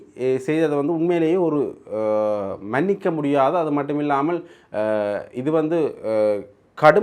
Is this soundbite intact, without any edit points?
yes; 0 cuts

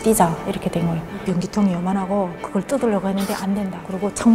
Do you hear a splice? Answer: yes; 1 cut; at 1.2 s

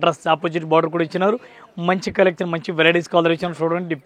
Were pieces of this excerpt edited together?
no; 0 cuts

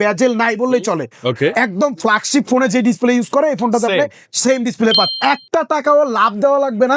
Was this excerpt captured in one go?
no; 1 cut; at 5.1 s

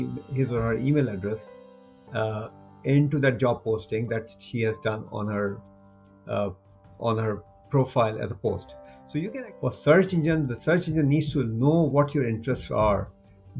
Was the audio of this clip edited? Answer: yes; 1 cut; at 9.3 s

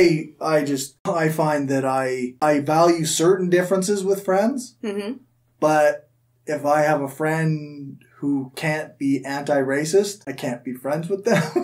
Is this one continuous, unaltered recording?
no; 3 cuts; at 0.9 s, 2.3 s, 10.2 s

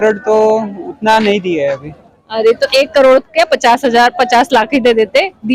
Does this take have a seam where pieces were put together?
no; 0 cuts

